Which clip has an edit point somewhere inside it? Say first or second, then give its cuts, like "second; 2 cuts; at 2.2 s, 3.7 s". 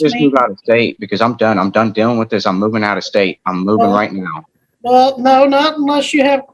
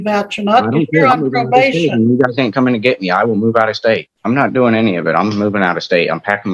second; 1 cut; at 4.1 s